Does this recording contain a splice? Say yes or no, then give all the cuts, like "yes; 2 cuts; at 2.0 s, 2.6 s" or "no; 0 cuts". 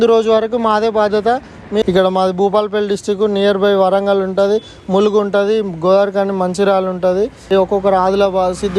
yes; 2 cuts; at 1.8 s, 7.5 s